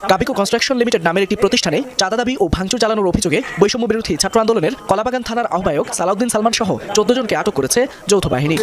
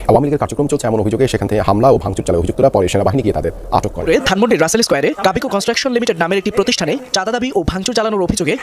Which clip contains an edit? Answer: second; 1 cut; at 4.0 s

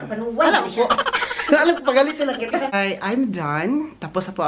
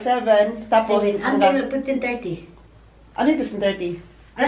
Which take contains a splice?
first; 1 cut; at 2.7 s

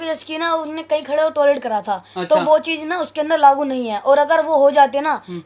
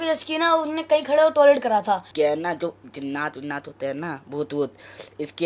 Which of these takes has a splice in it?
second; 1 cut; at 2.1 s

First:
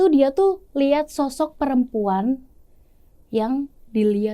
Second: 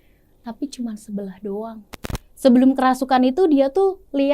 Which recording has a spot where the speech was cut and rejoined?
second; 1 cut; at 1.9 s

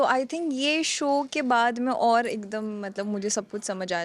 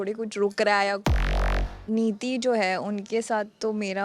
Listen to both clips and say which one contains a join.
second; 1 cut; at 1.3 s

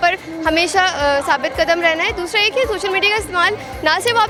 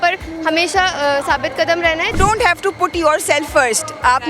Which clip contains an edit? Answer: second; 1 cut; at 2.1 s

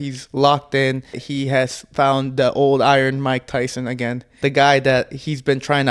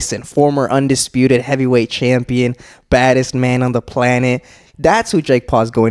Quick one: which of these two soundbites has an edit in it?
first; 2 cuts; at 1.2 s, 4.3 s

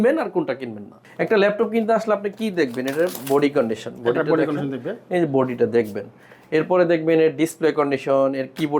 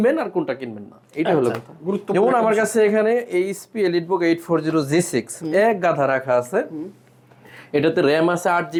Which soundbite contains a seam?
first; 1 cut; at 1.0 s

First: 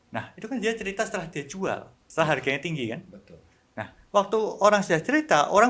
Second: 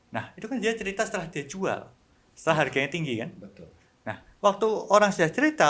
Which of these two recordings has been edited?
first; 1 cut; at 2.0 s

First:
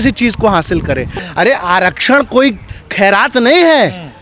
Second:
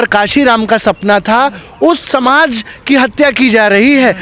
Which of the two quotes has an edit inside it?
first; 1 cut; at 1.2 s

